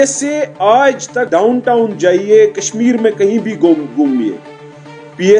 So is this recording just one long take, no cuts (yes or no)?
no